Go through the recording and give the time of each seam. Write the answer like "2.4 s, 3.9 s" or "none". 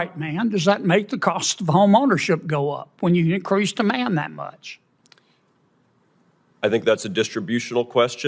none